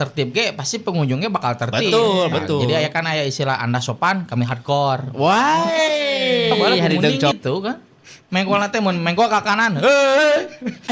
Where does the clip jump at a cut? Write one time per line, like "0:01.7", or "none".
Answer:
0:07.4

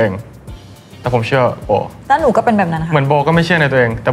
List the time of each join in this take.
0:01.9

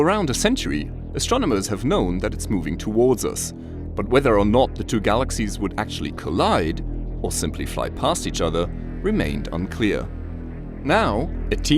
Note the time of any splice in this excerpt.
0:10.0

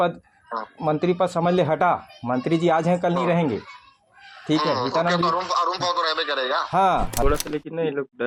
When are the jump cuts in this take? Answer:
0:07.2

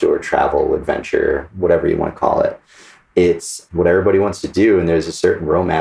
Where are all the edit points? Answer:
0:03.6

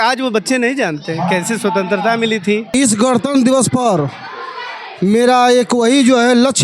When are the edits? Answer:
0:02.7

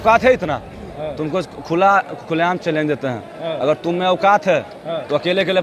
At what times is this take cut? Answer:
none

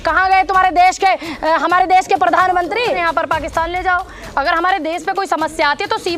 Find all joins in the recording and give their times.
0:03.0

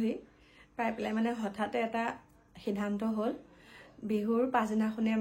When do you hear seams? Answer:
none

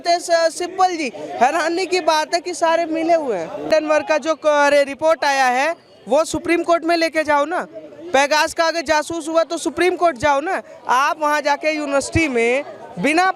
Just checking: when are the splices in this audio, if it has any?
0:03.6

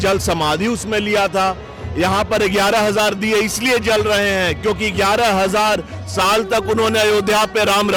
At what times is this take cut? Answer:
none

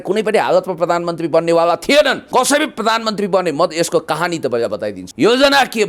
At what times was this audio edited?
0:02.2
0:05.0

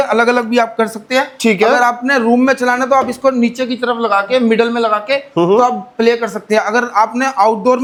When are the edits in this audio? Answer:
none

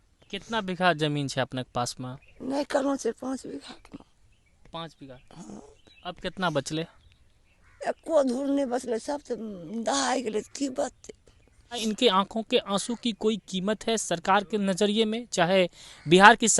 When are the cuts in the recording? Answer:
0:11.8

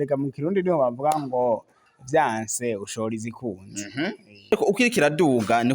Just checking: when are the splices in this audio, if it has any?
0:04.5

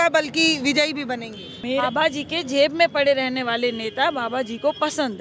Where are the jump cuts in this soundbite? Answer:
0:01.6

